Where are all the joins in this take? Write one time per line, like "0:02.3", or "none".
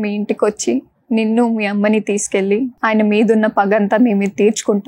0:02.7